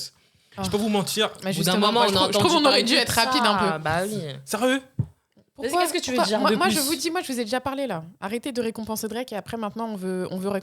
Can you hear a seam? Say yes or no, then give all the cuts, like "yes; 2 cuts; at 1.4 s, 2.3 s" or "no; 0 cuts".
no; 0 cuts